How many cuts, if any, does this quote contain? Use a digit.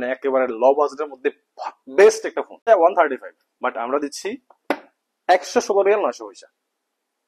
1